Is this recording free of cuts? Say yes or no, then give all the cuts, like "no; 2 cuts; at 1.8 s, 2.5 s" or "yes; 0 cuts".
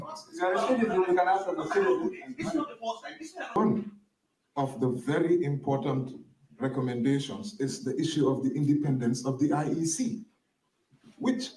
no; 1 cut; at 3.6 s